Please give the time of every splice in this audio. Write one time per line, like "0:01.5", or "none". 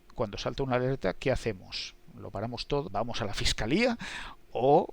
0:02.8